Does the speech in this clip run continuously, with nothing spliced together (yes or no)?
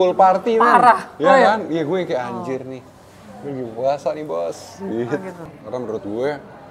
no